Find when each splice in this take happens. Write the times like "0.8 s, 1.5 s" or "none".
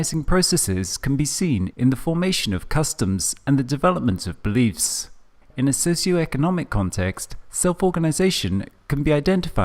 2.9 s